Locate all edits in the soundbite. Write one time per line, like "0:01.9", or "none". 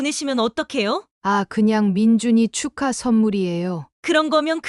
0:01.1